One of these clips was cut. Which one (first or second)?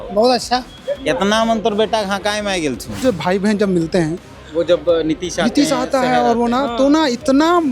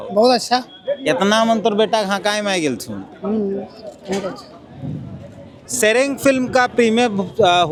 first